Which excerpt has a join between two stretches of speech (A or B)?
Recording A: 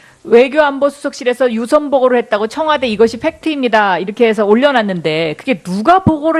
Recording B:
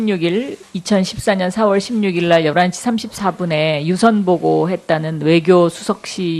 A